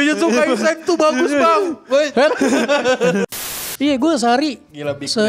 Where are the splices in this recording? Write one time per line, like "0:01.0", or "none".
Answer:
0:03.3